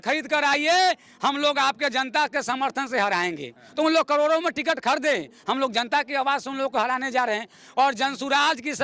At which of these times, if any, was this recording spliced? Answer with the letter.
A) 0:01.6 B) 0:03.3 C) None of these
C